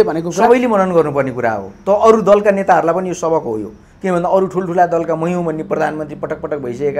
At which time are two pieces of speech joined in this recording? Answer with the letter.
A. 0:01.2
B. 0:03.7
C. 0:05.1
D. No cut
D